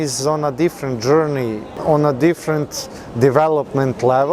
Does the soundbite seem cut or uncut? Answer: cut